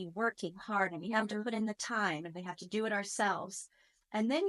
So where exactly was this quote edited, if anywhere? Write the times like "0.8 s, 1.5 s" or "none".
none

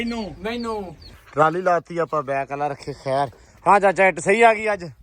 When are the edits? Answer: 1.2 s

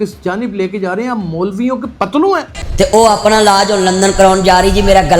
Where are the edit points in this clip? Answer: 2.6 s

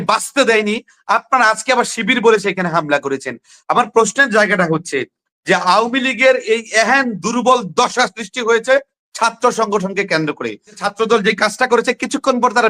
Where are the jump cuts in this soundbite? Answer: 10.8 s

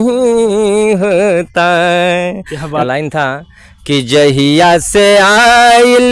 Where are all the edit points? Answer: 2.8 s

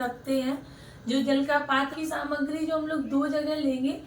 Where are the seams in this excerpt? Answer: 1.9 s

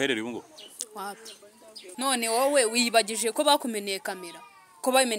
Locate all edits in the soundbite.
1.9 s

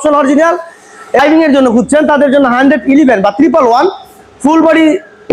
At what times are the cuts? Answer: 1.2 s

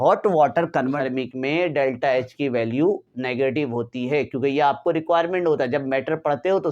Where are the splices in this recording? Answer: 1.0 s

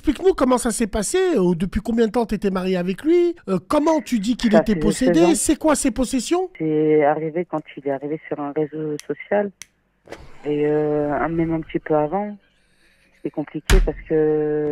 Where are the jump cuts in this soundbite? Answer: 3.4 s, 6.5 s

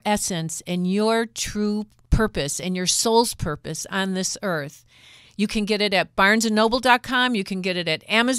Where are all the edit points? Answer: 2.0 s

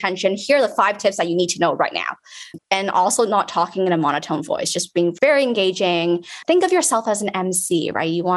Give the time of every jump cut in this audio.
2.5 s, 5.1 s

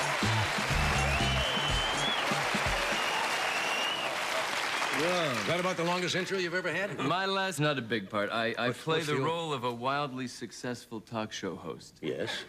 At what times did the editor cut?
none

